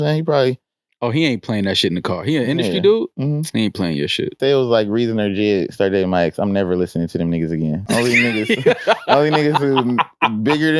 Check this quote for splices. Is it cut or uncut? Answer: cut